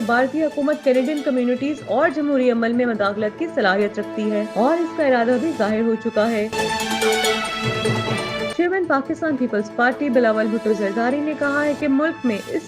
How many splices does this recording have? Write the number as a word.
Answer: two